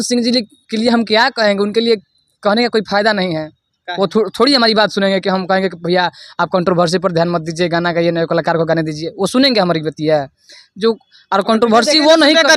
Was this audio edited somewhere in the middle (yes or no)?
no